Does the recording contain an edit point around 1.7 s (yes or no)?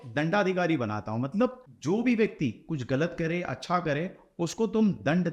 yes